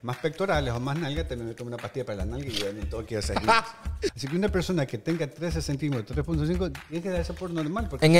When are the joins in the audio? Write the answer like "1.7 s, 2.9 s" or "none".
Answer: 4.2 s